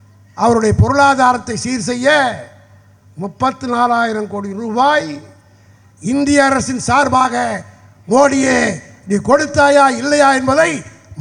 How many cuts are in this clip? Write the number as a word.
zero